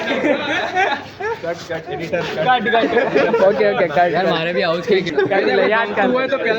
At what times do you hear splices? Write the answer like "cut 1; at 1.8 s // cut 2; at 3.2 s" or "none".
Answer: cut 1; at 5.1 s